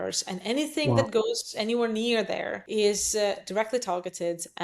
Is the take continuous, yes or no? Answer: no